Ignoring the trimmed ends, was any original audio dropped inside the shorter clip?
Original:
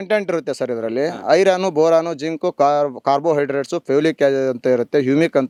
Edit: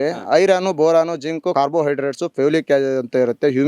yes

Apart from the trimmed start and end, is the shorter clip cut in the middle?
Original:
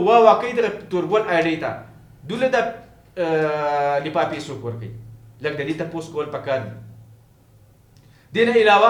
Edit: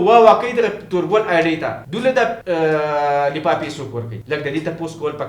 yes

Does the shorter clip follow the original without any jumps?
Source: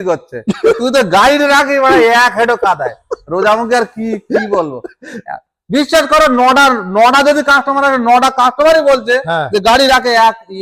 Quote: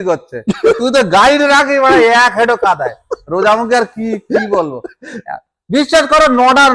yes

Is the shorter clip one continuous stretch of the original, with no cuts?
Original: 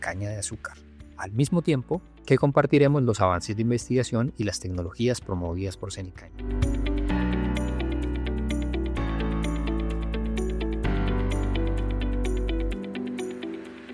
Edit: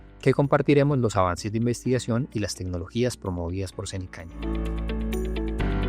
no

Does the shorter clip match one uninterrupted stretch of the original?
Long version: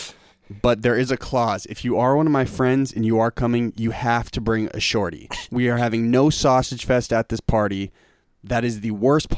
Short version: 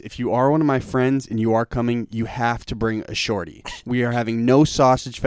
yes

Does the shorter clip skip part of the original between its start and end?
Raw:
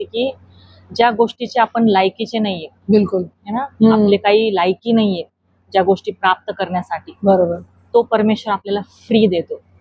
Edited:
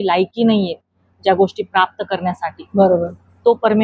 no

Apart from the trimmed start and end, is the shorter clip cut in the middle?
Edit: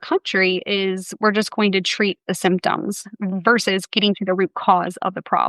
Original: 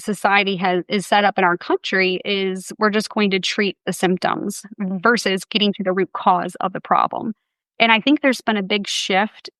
no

